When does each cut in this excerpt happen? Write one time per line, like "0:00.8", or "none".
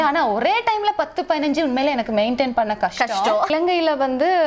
0:03.5